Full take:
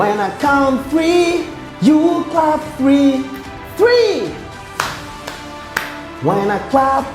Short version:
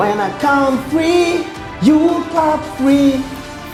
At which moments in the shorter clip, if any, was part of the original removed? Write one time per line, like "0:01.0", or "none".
none